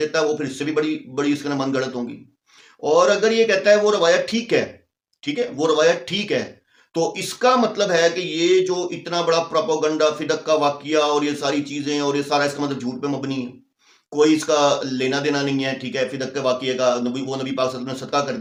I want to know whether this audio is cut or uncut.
uncut